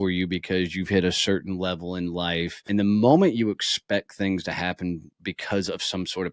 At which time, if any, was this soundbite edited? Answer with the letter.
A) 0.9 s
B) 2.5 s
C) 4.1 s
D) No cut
B